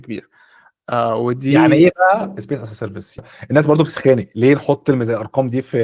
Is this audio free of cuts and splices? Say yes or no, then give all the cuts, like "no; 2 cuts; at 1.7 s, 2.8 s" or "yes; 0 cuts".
no; 1 cut; at 3.3 s